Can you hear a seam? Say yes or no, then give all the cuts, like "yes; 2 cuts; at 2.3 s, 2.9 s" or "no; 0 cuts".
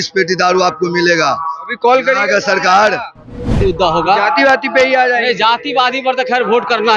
yes; 1 cut; at 3.6 s